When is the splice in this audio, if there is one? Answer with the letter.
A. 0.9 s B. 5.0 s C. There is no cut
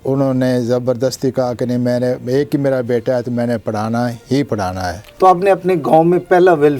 B